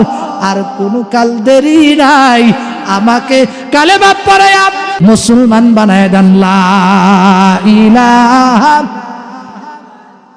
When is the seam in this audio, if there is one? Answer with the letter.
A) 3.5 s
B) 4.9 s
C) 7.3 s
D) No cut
B